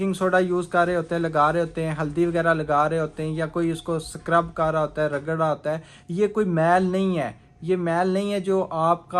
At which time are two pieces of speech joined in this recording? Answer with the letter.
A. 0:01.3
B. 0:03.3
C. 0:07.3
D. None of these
D